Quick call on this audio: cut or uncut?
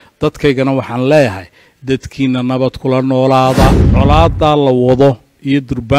cut